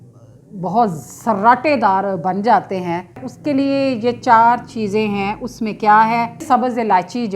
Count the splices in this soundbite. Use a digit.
2